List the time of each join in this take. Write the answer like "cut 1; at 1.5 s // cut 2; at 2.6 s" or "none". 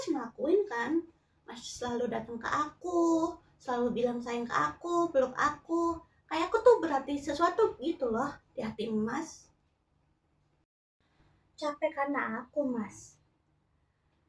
cut 1; at 8.5 s